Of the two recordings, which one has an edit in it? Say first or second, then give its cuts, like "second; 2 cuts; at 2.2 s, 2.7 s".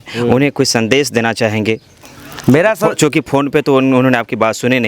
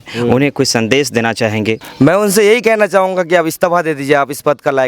second; 1 cut; at 1.9 s